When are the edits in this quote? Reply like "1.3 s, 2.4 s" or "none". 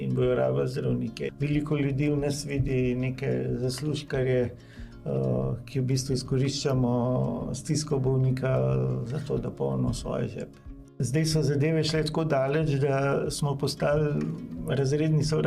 1.3 s, 11.0 s